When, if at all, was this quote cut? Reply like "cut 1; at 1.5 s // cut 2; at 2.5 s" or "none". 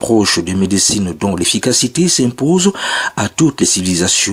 none